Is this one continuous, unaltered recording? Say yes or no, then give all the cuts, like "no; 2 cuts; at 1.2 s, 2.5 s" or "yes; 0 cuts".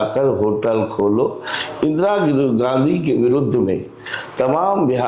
yes; 0 cuts